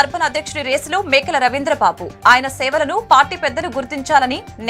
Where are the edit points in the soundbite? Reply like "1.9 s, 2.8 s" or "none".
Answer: none